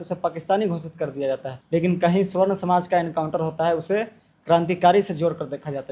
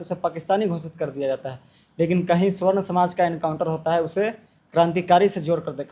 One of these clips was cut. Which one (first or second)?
first